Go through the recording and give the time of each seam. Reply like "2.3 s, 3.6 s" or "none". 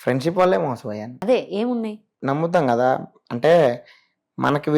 2.0 s